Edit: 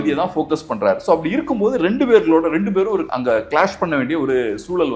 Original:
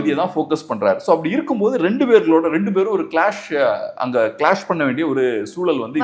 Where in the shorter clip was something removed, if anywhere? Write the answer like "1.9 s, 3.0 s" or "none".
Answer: 3.1 s

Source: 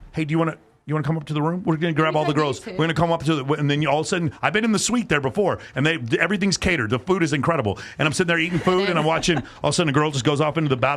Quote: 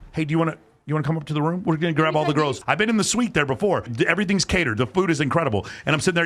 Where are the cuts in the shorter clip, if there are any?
2.6 s, 3.9 s

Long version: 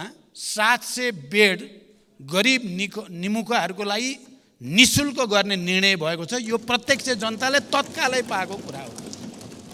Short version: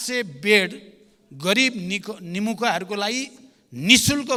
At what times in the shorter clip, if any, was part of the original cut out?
none

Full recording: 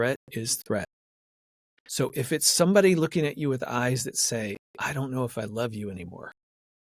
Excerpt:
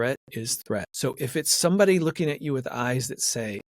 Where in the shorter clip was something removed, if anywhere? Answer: 0.9 s

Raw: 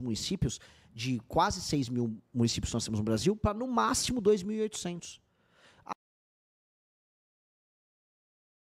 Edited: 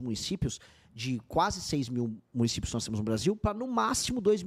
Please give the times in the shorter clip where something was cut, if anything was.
none

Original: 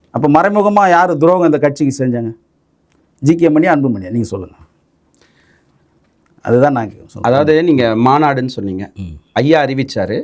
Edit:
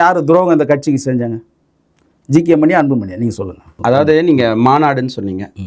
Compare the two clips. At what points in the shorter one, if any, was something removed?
3.6 s

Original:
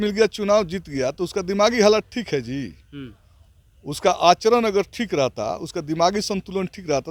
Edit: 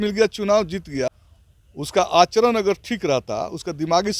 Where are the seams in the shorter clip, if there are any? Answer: 1.1 s

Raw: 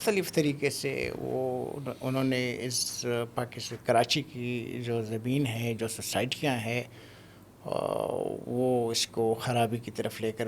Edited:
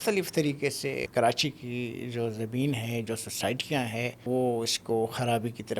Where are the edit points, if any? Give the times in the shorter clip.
1.1 s, 4.2 s

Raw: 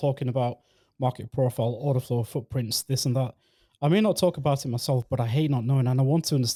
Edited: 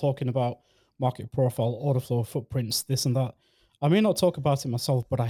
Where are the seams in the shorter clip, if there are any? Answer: none

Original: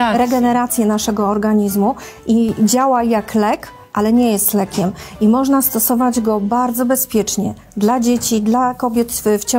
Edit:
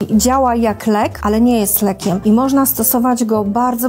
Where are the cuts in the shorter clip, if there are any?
1.2 s, 2.2 s

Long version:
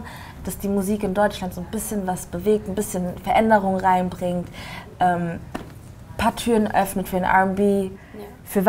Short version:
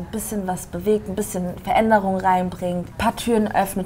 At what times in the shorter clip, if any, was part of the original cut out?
2.9 s

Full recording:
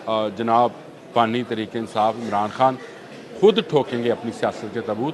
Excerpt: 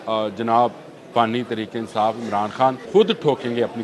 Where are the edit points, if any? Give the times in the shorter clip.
2.8 s

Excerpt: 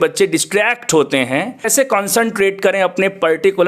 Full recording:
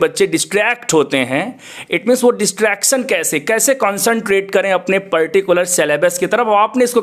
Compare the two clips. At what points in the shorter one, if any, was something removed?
1.7 s

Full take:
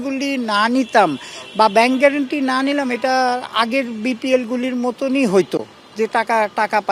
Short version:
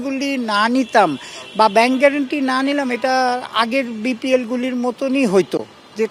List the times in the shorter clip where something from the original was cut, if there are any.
none

